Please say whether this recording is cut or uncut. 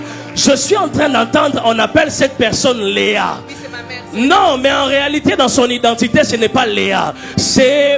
uncut